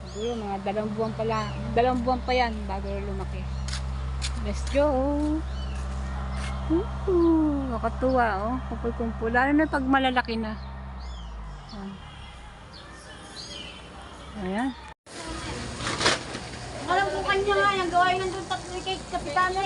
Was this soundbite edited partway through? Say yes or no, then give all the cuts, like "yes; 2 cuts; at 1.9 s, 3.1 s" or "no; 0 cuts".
yes; 1 cut; at 15.1 s